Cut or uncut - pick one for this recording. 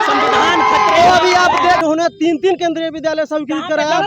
cut